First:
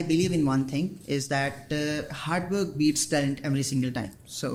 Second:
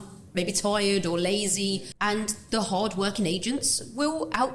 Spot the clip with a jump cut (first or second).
second